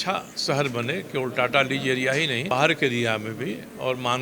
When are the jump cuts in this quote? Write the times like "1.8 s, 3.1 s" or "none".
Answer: 2.5 s